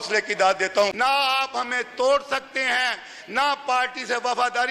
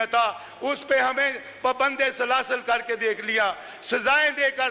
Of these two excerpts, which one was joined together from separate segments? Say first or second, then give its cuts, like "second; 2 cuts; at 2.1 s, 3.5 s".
first; 1 cut; at 0.9 s